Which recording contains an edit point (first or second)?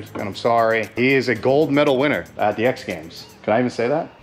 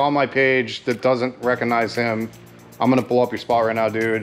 first